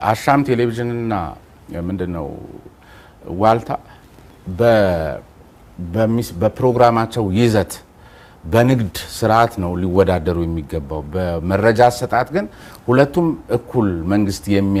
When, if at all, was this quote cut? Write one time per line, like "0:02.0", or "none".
none